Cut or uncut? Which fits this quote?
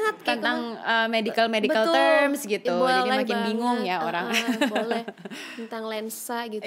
uncut